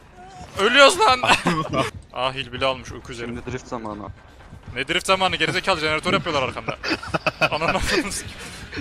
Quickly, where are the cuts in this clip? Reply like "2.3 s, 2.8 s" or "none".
1.9 s